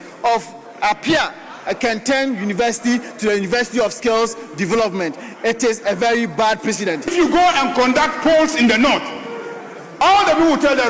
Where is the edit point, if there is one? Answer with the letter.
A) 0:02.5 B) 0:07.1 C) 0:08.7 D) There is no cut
B